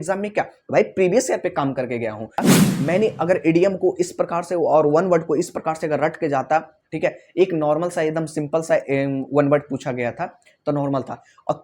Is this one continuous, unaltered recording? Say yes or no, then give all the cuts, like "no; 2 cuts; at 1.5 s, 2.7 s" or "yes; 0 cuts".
no; 1 cut; at 2.5 s